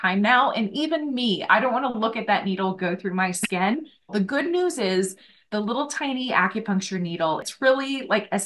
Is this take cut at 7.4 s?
yes; 2 cuts; at 4.1 s, 7.4 s

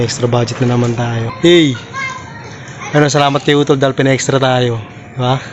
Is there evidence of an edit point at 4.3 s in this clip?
no; 1 cut; at 1.2 s

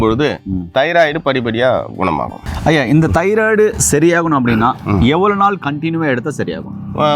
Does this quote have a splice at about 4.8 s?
no; 1 cut; at 2.4 s

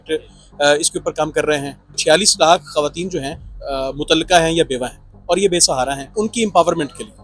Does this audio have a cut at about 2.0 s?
yes; 3 cuts; at 2.0 s, 3.6 s, 6.1 s

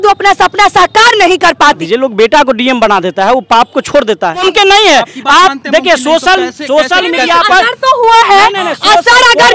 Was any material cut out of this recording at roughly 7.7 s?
no; 2 cuts; at 1.8 s, 4.4 s

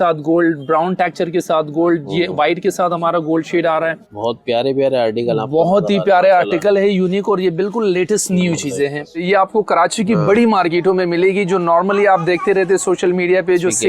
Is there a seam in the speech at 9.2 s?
yes; 2 cuts; at 4.1 s, 9.2 s

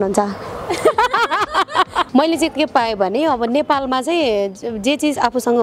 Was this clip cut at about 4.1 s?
no; 1 cut; at 2.1 s

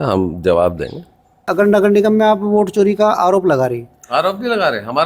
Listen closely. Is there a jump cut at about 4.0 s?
no; 1 cut; at 1.3 s

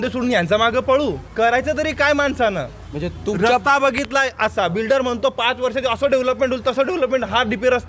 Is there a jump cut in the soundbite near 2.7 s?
no; 1 cut; at 1.2 s

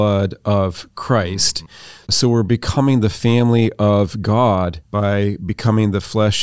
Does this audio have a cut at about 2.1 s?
yes; 2 cuts; at 2.1 s, 4.8 s

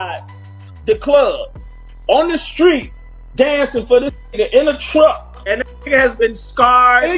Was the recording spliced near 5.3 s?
yes; 1 cut; at 5.3 s

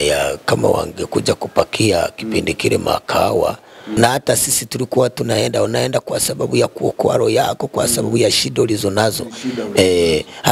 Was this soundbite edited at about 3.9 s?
yes; 1 cut; at 3.9 s

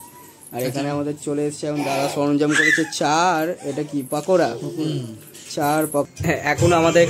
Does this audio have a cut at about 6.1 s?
yes; 1 cut; at 6.1 s

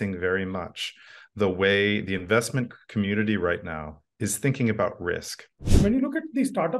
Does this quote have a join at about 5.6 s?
yes; 1 cut; at 5.6 s

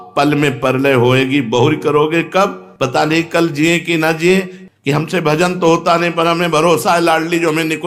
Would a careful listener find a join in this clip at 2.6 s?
no; 1 cut; at 4.6 s

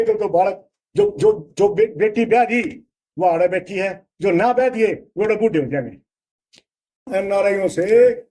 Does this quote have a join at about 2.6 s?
no; 1 cut; at 7.1 s

